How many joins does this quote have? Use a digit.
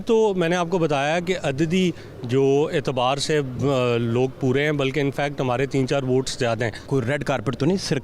1